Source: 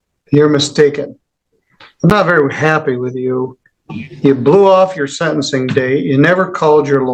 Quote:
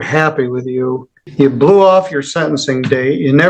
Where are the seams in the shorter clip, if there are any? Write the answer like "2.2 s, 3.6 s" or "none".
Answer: 1.2 s

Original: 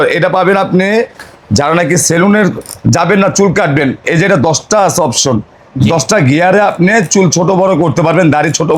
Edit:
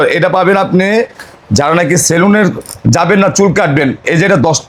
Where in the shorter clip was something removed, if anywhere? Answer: none

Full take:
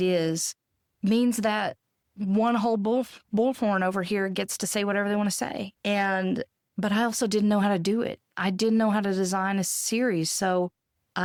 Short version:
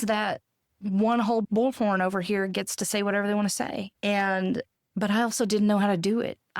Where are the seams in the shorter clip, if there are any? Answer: 1.5 s

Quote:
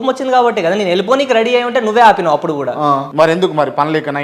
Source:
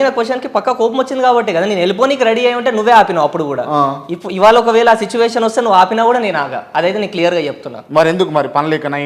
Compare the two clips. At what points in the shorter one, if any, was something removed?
3.1 s

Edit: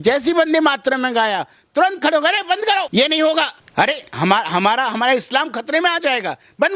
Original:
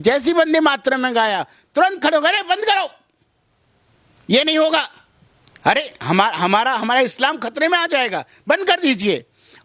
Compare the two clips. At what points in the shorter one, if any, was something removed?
2.9 s, 3.6 s

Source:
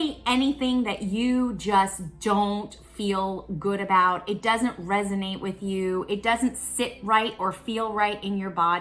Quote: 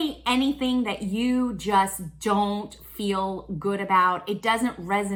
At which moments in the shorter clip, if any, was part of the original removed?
none

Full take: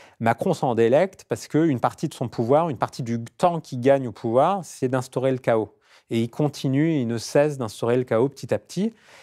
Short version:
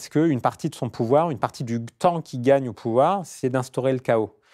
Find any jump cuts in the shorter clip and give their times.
none

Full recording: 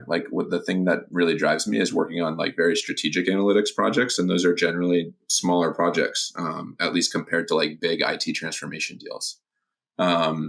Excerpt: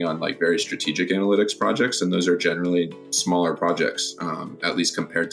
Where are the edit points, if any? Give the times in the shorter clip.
none

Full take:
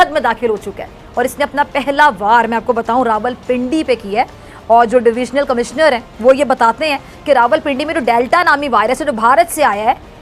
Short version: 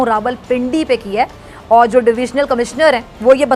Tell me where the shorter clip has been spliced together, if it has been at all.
none

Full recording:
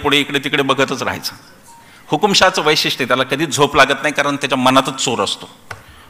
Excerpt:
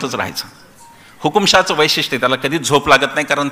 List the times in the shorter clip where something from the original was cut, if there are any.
none

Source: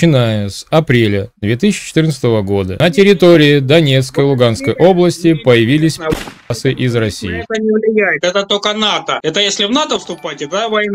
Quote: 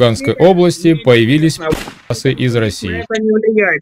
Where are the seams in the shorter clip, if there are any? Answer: none

